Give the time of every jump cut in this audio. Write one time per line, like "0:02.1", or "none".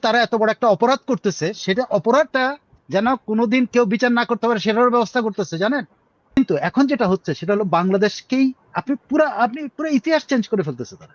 0:06.4